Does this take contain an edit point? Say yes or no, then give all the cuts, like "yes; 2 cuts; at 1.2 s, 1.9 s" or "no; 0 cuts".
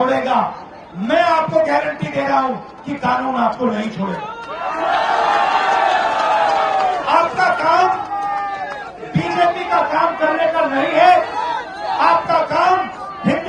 no; 0 cuts